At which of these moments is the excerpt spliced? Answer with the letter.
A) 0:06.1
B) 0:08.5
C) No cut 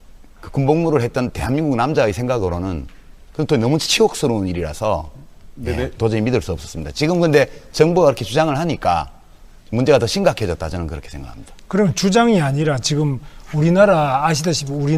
B